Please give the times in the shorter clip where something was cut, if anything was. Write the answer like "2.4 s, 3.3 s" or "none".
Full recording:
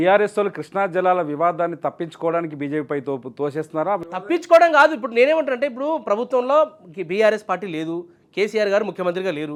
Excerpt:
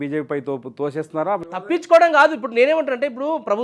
none